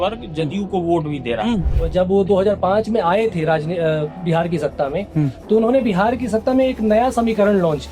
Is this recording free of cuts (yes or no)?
no